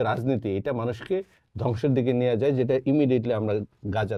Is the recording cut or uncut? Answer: uncut